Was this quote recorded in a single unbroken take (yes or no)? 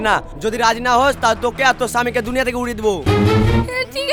yes